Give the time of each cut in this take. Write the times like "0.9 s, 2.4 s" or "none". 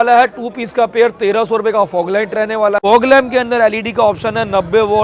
2.8 s